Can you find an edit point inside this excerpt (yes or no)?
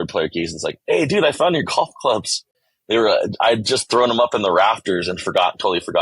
no